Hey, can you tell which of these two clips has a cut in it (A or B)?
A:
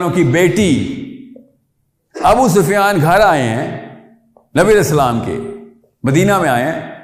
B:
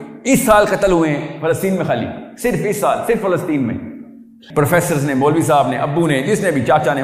B